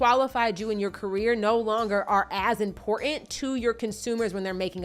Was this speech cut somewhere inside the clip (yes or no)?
no